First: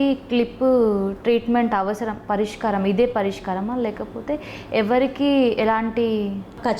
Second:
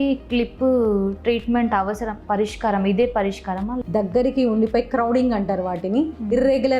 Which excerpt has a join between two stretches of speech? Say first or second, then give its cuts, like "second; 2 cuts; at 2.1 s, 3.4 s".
second; 1 cut; at 3.8 s